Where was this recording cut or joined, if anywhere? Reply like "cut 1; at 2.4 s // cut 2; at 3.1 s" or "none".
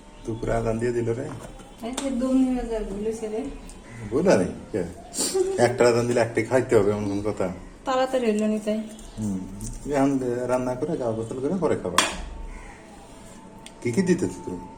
none